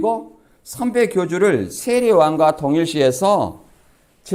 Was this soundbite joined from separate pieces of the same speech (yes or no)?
no